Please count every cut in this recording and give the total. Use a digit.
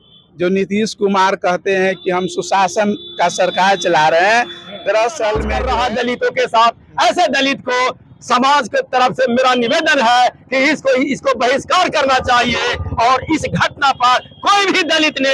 1